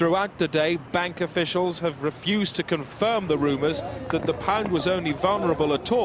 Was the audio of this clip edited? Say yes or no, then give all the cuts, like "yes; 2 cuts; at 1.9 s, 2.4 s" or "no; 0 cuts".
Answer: no; 0 cuts